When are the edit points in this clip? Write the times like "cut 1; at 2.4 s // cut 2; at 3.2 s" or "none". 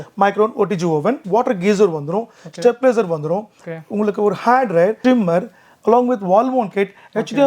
cut 1; at 1.2 s // cut 2; at 5.0 s